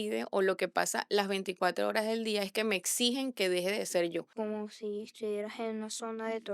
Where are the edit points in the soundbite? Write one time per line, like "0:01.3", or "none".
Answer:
0:04.3